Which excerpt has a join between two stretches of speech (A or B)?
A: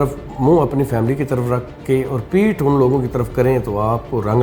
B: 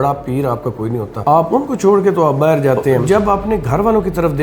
B